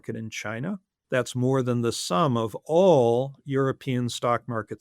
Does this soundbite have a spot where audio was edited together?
yes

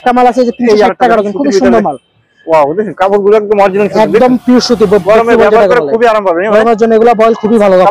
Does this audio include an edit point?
no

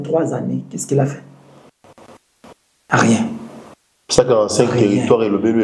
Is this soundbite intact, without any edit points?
yes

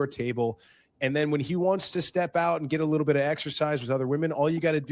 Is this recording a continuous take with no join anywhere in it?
yes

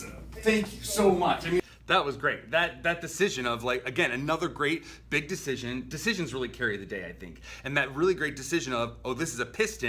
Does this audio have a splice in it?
no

